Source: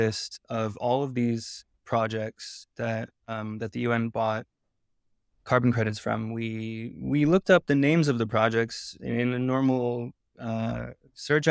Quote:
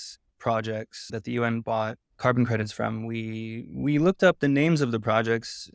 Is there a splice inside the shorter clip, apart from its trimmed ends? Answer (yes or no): yes